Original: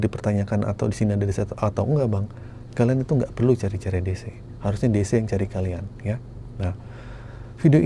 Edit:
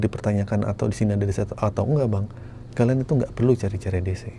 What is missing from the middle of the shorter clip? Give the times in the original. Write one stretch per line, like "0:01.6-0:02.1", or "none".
none